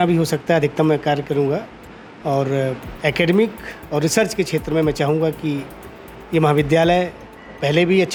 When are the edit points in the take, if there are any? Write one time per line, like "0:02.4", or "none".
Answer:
none